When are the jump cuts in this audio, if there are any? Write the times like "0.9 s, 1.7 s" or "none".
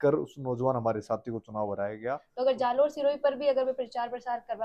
2.2 s